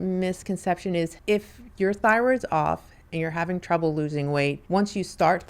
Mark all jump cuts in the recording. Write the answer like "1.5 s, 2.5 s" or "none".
1.2 s, 4.6 s